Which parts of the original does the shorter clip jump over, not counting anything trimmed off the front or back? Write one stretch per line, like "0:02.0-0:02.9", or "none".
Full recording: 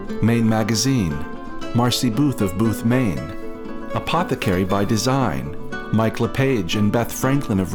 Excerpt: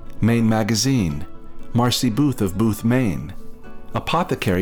none